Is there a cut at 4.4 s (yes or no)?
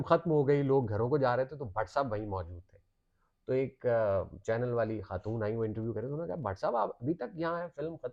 no